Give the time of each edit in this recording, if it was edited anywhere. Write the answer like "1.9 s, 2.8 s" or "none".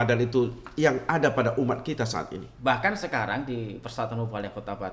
2.4 s